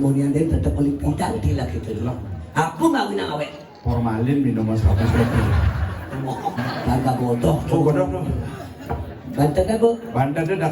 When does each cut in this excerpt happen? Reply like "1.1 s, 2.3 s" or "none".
6.6 s